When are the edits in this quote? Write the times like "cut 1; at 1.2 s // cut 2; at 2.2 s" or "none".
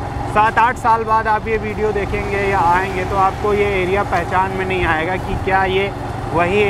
none